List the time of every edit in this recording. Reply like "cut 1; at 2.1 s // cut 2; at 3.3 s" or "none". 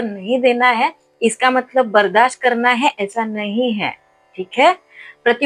none